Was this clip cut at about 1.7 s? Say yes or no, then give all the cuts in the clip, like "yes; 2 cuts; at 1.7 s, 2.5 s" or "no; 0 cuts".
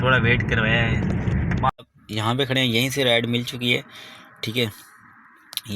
yes; 1 cut; at 1.7 s